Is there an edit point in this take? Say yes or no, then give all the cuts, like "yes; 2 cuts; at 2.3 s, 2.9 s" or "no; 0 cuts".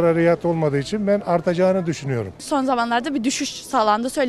yes; 1 cut; at 2.4 s